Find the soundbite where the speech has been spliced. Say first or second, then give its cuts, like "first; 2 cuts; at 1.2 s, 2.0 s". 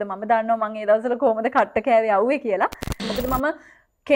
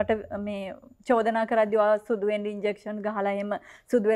first; 1 cut; at 3.0 s